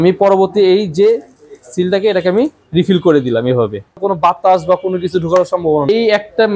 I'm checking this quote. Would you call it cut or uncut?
cut